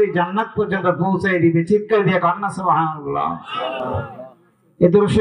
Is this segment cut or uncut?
uncut